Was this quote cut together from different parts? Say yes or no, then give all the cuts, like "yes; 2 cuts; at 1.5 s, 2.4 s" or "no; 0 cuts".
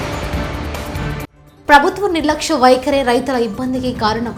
no; 0 cuts